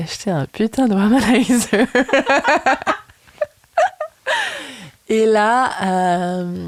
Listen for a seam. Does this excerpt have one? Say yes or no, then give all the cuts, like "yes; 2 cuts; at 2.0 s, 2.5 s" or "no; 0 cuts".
no; 0 cuts